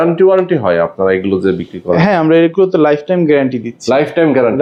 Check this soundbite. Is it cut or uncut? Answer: uncut